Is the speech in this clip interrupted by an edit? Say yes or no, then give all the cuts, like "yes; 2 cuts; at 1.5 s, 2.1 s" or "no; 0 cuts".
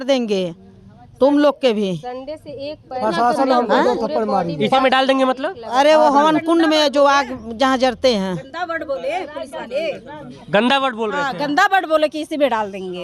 no; 0 cuts